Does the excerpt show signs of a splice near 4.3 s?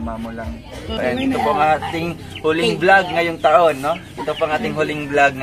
no; 1 cut; at 1.0 s

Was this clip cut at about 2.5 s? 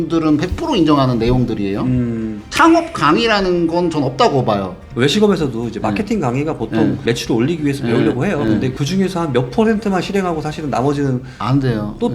no; 1 cut; at 4.9 s

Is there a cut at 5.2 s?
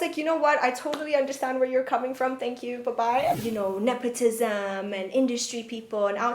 no; 1 cut; at 3.4 s

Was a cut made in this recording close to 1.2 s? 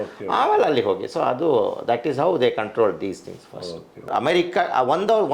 no; 1 cut; at 4.1 s

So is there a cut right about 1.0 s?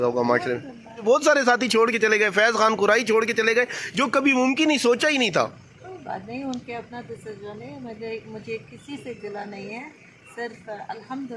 yes; 1 cut; at 1.0 s

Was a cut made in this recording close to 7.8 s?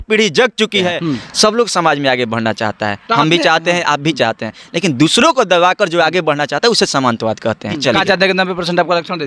yes; 2 cuts; at 0.9 s, 7.8 s

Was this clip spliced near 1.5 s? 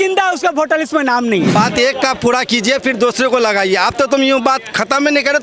yes; 1 cut; at 1.5 s

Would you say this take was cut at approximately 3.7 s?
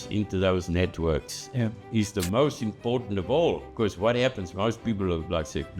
yes; 1 cut; at 3.7 s

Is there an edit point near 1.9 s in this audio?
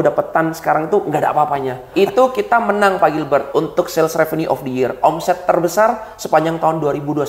yes; 1 cut; at 1.9 s

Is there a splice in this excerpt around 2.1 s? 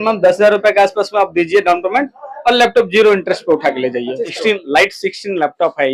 no; 1 cut; at 4.4 s

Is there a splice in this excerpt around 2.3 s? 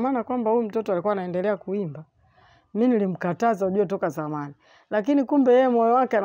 no; 0 cuts

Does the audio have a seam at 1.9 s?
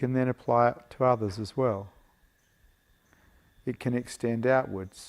no; 0 cuts

